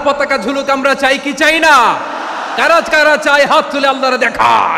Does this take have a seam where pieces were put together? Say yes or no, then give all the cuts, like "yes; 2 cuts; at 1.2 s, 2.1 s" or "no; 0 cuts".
no; 0 cuts